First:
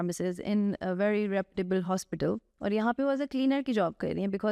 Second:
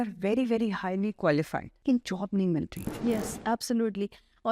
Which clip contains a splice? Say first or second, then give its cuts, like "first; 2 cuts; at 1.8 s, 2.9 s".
second; 2 cuts; at 1.7 s, 2.8 s